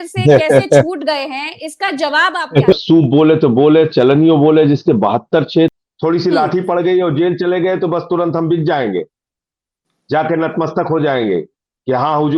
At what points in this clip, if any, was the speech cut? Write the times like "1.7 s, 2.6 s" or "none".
2.7 s, 5.8 s

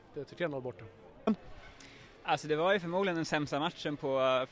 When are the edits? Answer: 1.3 s

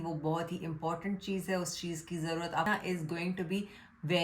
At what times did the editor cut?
2.7 s

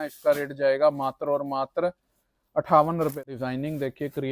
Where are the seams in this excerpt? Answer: 3.1 s

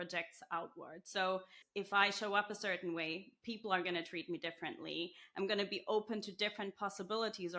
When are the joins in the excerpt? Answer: 1.6 s

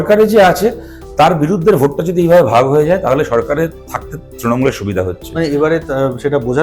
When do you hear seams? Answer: none

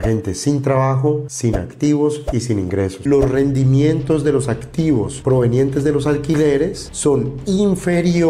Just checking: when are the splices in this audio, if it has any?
3.0 s

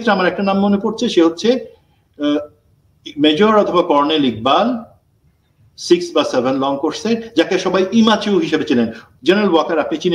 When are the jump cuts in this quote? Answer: none

